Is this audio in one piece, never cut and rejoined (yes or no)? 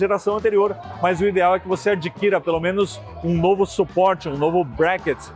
yes